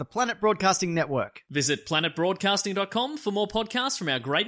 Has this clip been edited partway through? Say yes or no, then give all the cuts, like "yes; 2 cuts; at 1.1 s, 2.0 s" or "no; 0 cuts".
no; 0 cuts